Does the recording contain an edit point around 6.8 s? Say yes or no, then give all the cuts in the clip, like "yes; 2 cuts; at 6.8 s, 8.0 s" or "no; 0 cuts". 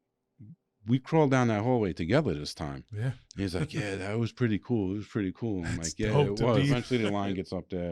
yes; 1 cut; at 6.8 s